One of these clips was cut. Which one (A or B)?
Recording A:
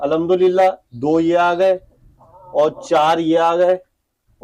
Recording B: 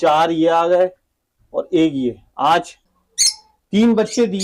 B